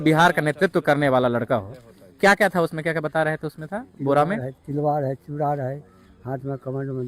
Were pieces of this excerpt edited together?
yes; 1 cut; at 2.1 s

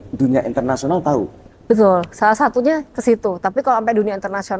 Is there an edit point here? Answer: no; 0 cuts

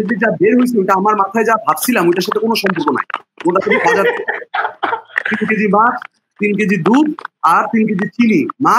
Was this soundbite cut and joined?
no; 0 cuts

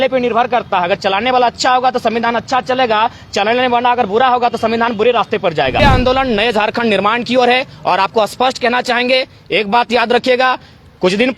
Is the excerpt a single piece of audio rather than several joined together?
no; 1 cut; at 5.8 s

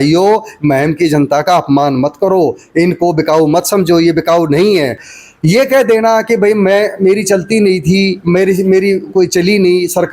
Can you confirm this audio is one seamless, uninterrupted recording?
no; 1 cut; at 5.1 s

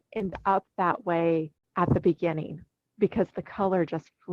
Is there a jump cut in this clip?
yes; 1 cut; at 1.6 s

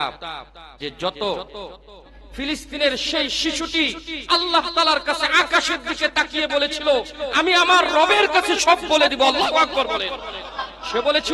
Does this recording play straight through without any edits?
no; 1 cut; at 2.2 s

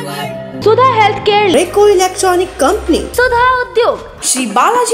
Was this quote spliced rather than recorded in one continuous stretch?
no; 0 cuts

